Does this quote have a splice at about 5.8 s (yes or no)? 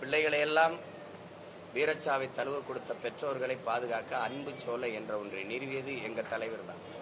no